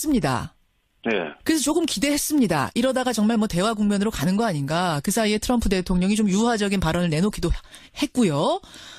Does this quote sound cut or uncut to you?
uncut